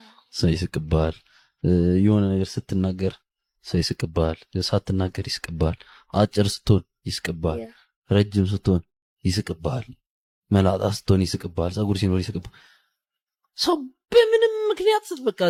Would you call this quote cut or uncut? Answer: uncut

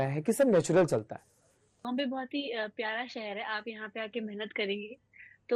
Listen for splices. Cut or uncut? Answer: cut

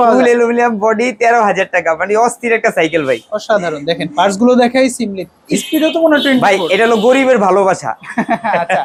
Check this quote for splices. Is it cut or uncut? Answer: uncut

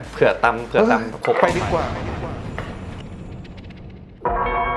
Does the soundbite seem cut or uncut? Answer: uncut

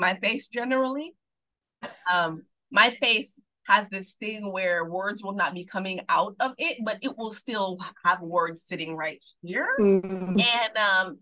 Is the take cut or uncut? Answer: uncut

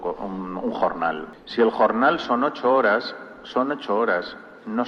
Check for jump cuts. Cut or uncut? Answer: uncut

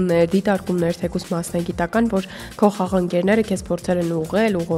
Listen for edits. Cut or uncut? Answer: uncut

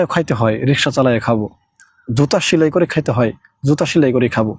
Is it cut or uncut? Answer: uncut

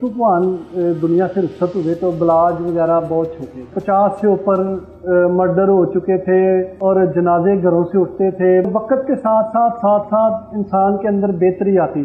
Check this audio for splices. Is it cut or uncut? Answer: cut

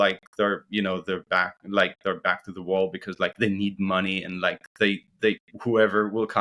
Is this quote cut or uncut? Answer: uncut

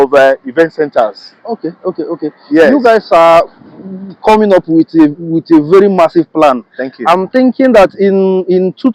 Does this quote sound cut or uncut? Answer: uncut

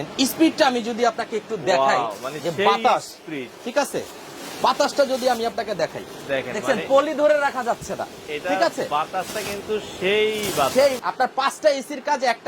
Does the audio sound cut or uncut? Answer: cut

